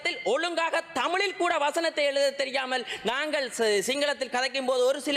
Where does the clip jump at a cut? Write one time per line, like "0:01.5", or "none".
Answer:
none

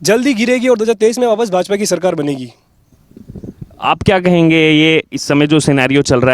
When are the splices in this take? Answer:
none

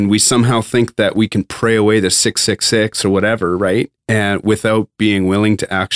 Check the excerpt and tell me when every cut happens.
0:01.5

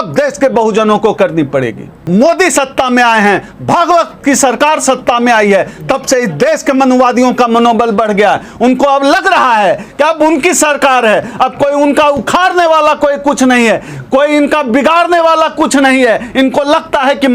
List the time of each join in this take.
0:02.0

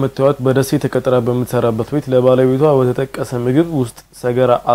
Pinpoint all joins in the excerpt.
none

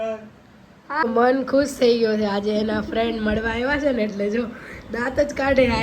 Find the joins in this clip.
0:01.0

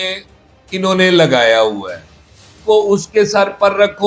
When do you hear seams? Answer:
0:02.5

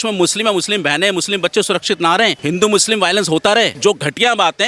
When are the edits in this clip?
0:02.4
0:03.7

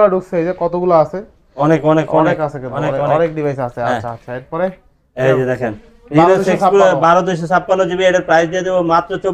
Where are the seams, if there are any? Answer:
none

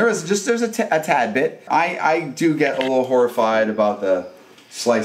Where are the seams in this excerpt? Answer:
0:01.6

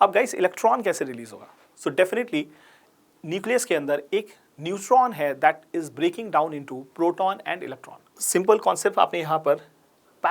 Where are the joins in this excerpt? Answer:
0:08.1

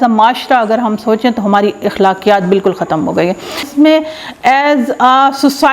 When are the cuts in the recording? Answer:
none

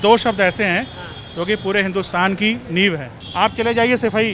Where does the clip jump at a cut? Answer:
0:03.2

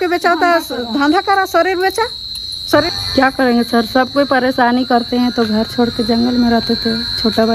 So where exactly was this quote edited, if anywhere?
0:02.9

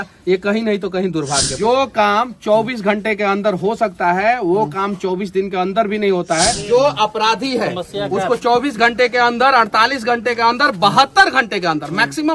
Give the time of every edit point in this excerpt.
0:01.5
0:06.6

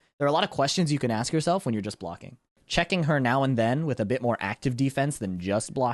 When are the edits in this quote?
0:02.6

